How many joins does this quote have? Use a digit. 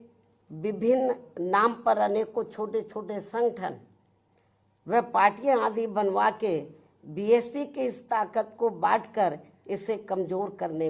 0